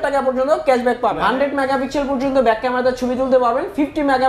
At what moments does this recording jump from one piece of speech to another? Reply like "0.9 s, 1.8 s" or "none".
1.2 s